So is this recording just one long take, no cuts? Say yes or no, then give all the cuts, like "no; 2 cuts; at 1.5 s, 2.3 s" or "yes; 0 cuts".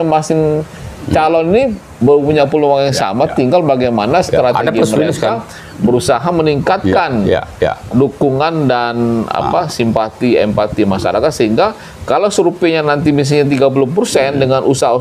yes; 0 cuts